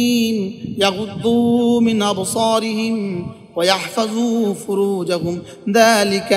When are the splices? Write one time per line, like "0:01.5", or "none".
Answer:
none